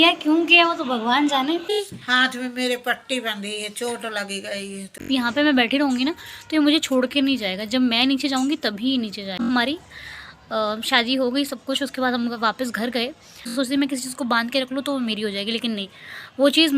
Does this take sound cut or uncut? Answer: cut